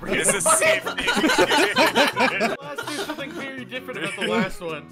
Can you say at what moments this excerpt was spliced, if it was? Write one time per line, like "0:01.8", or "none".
0:02.6